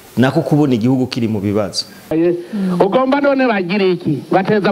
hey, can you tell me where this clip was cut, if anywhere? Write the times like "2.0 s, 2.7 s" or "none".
2.1 s

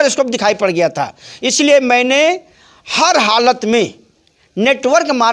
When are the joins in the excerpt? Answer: none

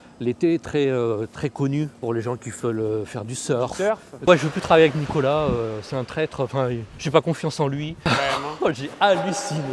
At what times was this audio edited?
2.0 s, 4.2 s, 8.0 s

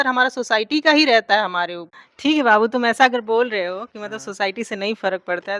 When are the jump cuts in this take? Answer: 2.0 s

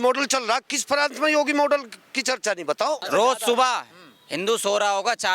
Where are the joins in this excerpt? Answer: 3.1 s

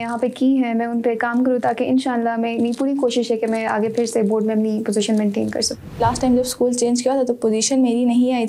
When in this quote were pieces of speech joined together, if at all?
6.0 s

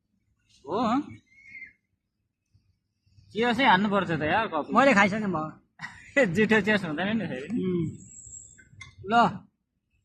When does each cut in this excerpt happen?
6.3 s

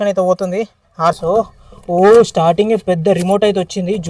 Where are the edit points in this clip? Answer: 1.1 s

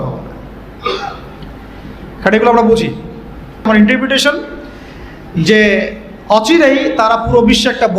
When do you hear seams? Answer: 3.7 s

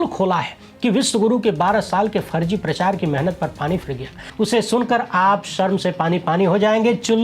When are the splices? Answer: 4.2 s

